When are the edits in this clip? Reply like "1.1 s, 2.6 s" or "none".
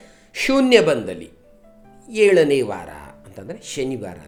none